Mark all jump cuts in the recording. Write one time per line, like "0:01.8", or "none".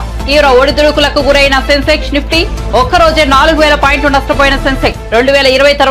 none